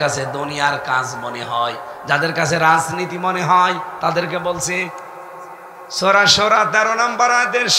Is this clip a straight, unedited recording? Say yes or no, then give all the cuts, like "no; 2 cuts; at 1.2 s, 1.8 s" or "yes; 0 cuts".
yes; 0 cuts